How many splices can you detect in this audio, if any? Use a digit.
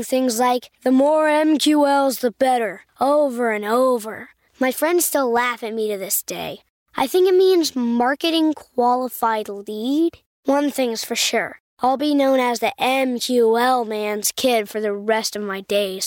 0